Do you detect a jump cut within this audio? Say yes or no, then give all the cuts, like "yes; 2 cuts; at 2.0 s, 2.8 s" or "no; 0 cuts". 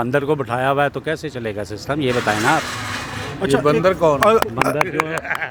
no; 0 cuts